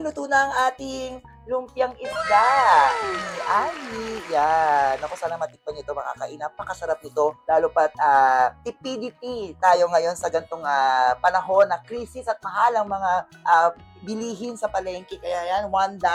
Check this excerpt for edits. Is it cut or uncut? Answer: uncut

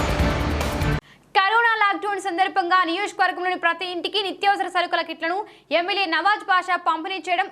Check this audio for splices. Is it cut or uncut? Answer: cut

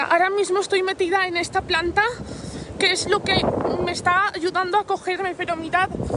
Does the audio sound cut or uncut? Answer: uncut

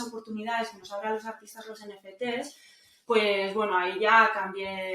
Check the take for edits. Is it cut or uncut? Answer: uncut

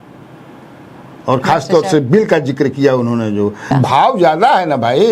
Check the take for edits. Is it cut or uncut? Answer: cut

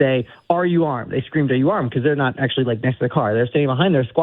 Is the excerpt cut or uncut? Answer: uncut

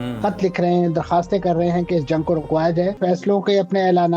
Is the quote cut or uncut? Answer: cut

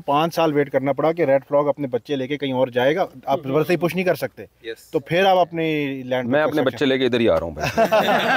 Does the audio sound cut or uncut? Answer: uncut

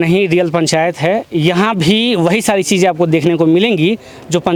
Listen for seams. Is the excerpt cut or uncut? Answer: uncut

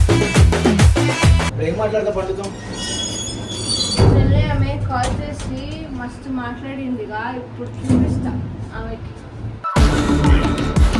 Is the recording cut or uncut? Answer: cut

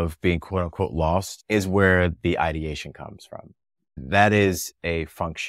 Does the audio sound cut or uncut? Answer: cut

